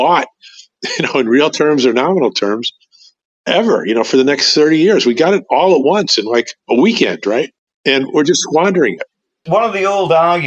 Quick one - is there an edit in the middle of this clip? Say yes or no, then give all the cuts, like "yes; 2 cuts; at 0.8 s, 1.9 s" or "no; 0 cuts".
yes; 2 cuts; at 7.6 s, 9.3 s